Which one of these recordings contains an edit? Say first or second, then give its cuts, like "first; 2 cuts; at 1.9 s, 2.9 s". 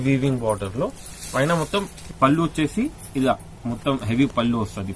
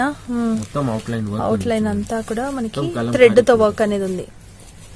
first; 1 cut; at 2.0 s